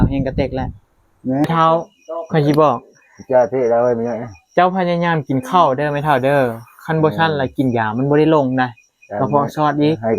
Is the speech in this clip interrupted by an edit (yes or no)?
yes